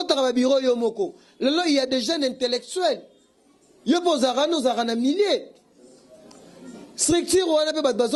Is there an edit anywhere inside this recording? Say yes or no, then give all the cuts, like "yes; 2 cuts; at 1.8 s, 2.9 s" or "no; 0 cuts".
no; 0 cuts